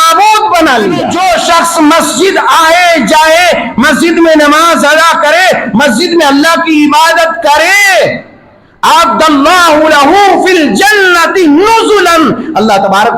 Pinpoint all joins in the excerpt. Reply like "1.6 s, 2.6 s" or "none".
1.1 s